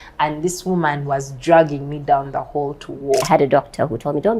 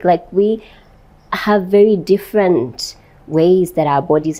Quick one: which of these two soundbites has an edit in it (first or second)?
first